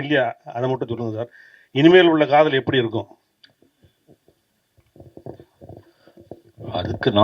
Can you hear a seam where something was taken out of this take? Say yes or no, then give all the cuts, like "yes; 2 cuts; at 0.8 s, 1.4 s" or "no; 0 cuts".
no; 0 cuts